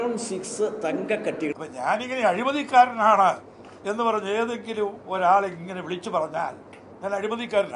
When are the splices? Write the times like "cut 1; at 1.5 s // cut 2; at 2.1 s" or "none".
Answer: cut 1; at 1.6 s